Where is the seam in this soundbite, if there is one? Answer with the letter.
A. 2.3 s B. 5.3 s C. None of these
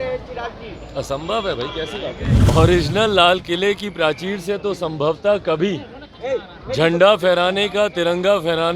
A